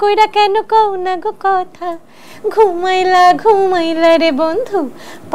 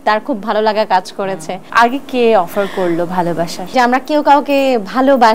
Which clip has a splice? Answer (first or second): second